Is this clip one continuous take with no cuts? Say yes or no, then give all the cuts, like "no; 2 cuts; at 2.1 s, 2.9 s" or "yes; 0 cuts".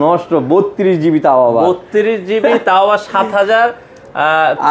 yes; 0 cuts